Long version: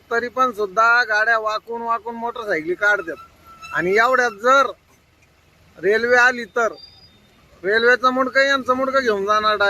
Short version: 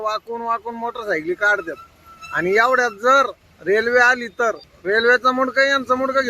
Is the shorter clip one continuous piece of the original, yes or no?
no